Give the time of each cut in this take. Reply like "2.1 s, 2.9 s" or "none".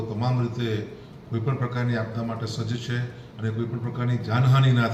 none